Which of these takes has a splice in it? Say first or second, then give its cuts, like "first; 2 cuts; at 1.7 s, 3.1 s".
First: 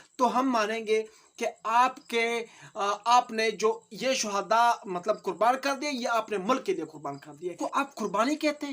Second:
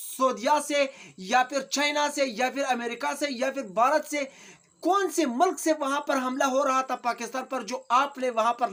first; 1 cut; at 7.6 s